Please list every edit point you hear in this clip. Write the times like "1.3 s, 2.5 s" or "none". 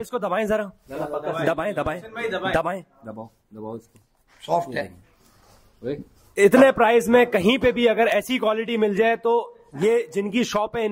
none